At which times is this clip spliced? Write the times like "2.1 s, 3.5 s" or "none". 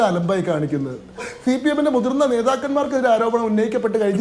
1.3 s